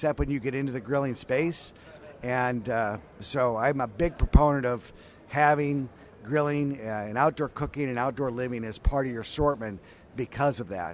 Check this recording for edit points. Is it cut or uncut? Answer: uncut